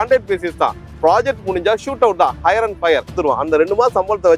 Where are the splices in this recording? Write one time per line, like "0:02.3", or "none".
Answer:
0:03.1